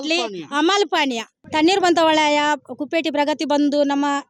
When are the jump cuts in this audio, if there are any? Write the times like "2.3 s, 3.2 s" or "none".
1.3 s